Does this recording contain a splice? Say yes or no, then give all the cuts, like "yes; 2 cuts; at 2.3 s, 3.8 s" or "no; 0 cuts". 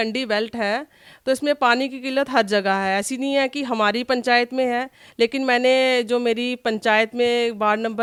no; 0 cuts